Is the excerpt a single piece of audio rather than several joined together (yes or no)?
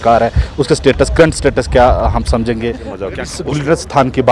no